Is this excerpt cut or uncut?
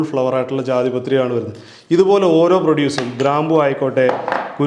uncut